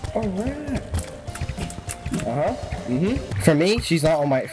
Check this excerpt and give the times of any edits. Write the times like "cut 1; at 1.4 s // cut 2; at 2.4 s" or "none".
cut 1; at 3.3 s